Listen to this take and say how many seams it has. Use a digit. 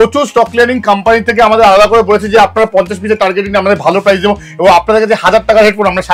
0